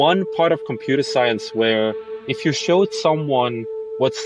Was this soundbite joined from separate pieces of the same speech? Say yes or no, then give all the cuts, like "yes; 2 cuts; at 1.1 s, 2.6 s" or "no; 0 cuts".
no; 0 cuts